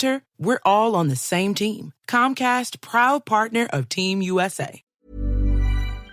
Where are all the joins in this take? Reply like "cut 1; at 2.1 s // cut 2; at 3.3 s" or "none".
cut 1; at 4.8 s